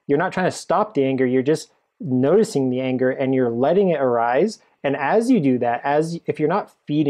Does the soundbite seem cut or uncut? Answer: uncut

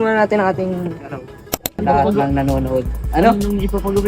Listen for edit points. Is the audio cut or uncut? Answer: cut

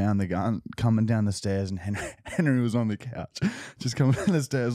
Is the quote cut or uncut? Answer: uncut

